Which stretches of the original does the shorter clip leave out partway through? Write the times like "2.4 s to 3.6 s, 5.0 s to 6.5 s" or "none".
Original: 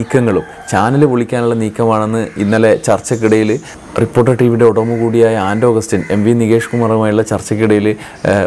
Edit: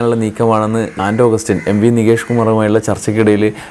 2.4 s to 5.4 s